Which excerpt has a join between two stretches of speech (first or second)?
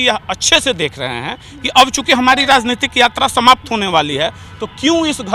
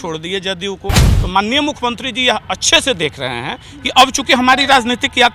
second